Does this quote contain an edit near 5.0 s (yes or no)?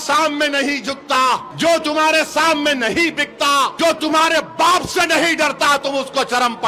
no